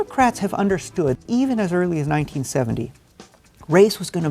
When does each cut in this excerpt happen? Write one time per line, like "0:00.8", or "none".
0:01.2